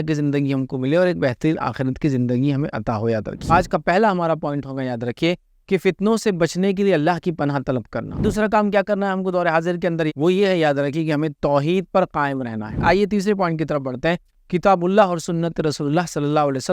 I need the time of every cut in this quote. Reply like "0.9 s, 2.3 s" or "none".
3.5 s, 8.2 s, 10.1 s, 12.8 s, 14.3 s